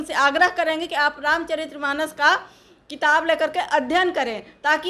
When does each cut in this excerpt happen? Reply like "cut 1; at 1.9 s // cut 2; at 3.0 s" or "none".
none